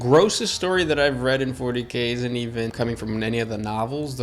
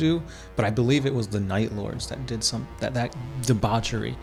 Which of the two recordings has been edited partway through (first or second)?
first